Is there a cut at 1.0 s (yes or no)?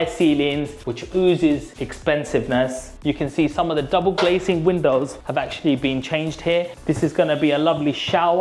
no